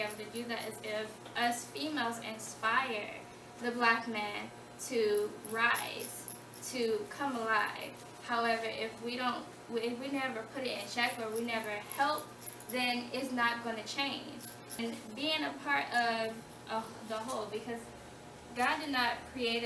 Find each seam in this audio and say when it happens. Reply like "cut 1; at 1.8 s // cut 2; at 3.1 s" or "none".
cut 1; at 14.8 s